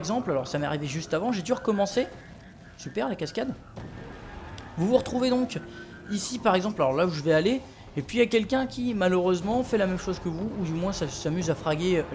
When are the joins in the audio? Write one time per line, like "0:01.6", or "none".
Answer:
none